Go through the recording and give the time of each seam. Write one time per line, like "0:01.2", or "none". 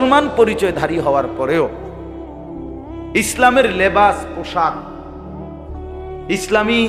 none